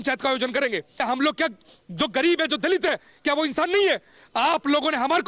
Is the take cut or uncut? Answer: cut